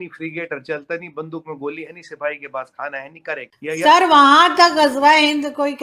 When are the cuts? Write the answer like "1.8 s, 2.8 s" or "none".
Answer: 3.5 s